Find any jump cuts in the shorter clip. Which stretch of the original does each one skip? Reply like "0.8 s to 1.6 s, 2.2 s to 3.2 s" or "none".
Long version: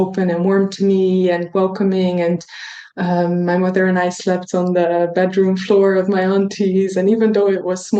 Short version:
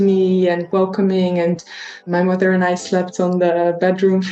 2.9 s to 3.4 s